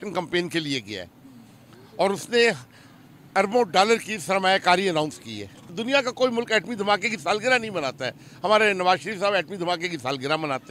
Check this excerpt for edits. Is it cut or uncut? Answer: uncut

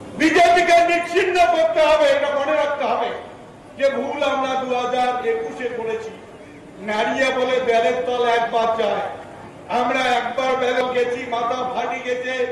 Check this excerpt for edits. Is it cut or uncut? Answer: cut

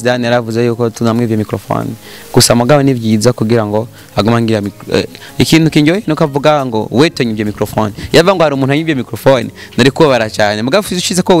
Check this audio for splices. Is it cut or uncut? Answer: uncut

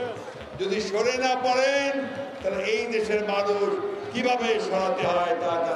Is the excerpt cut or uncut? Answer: uncut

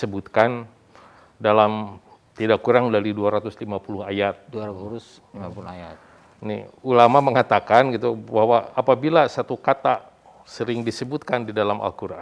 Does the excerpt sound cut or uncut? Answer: uncut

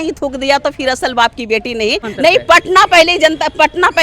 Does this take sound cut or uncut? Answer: cut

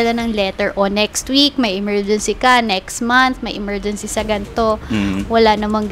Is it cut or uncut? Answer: uncut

